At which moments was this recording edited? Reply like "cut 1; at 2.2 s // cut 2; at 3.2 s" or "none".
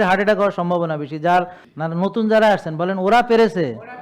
cut 1; at 1.5 s